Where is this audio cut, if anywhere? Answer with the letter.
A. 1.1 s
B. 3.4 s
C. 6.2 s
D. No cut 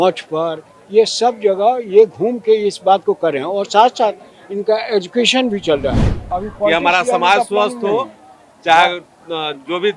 C